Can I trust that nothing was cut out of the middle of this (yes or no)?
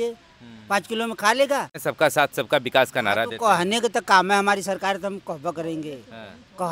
no